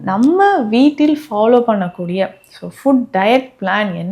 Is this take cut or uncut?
uncut